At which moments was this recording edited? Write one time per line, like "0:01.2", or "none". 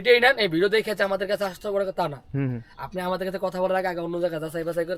none